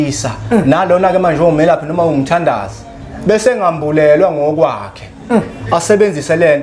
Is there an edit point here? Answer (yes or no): no